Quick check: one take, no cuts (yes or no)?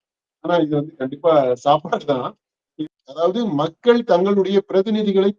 no